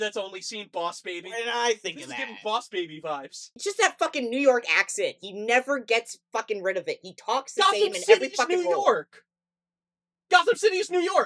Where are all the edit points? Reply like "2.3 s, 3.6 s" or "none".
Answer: 3.5 s

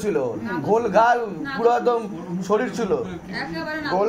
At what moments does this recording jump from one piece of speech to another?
none

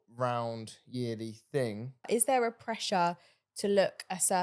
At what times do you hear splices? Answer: 2.1 s

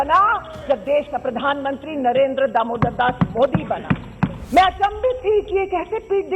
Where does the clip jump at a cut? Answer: 4.4 s

